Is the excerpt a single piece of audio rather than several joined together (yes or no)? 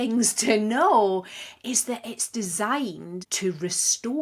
no